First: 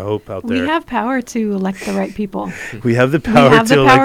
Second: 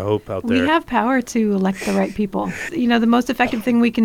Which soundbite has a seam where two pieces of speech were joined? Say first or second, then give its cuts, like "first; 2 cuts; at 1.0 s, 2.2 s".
second; 1 cut; at 2.7 s